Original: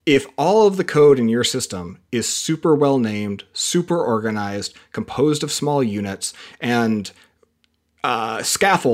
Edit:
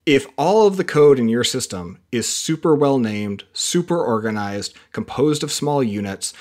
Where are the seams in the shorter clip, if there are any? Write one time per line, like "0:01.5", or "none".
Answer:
none